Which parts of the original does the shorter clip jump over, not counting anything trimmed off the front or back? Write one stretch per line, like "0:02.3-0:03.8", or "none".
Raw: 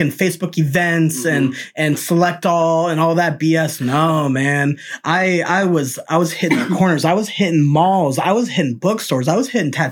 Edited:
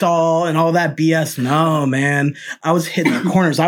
0:04.9-0:06.0